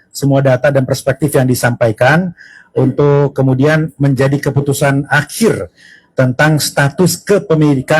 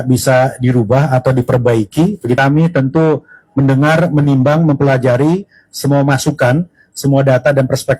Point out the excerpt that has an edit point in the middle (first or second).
second